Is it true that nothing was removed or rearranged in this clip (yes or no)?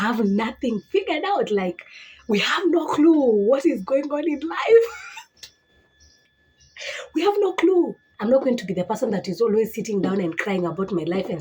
no